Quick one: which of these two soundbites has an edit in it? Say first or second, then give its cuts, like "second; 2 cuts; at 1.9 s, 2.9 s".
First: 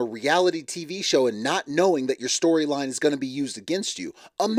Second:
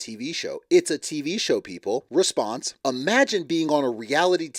second; 2 cuts; at 2.1 s, 2.7 s